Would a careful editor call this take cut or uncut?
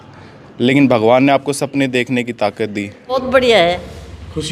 cut